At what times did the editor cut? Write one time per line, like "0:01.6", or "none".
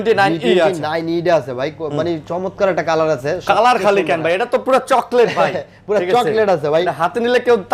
none